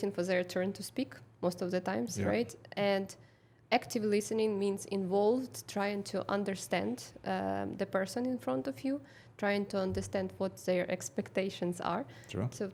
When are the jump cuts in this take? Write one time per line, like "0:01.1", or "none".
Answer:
none

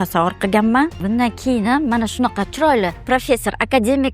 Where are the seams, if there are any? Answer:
0:01.0
0:03.0

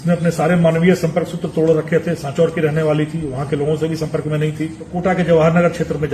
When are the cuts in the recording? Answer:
0:04.8

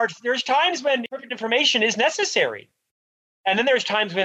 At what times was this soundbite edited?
0:01.1

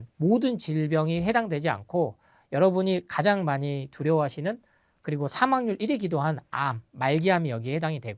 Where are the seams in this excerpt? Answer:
none

